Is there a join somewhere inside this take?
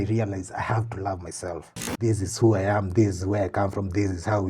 yes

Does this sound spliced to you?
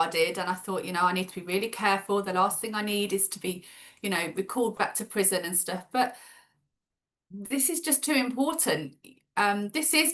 no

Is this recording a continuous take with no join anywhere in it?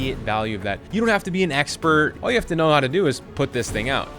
no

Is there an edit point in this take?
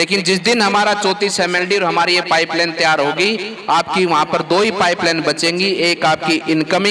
no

